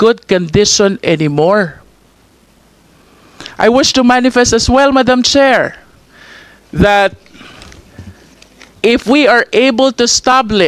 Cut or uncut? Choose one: uncut